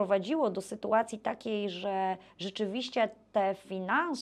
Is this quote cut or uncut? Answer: uncut